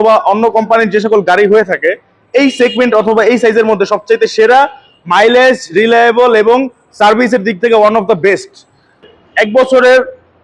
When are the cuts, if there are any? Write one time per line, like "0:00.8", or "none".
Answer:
0:09.2